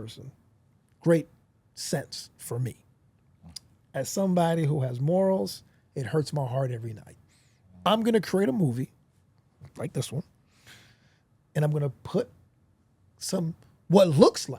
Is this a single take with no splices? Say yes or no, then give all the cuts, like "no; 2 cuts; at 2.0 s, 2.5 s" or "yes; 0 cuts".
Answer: no; 1 cut; at 7.8 s